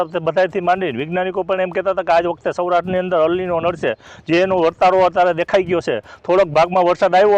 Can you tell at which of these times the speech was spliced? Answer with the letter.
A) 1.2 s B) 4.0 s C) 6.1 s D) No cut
D